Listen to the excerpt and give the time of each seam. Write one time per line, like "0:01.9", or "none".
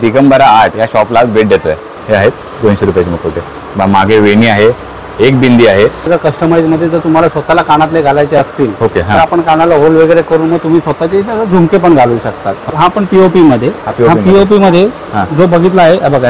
0:01.9
0:06.1
0:12.6